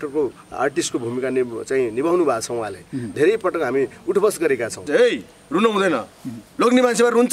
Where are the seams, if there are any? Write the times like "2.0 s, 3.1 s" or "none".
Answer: 4.8 s